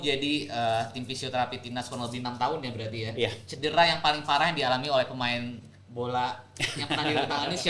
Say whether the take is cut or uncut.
uncut